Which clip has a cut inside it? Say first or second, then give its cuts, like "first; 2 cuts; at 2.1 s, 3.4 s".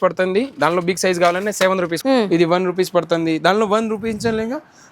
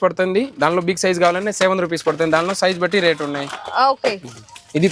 first; 1 cut; at 1.9 s